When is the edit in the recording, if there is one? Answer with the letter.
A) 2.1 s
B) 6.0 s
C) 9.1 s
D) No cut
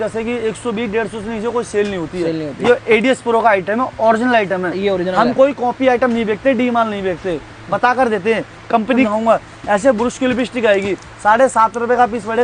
C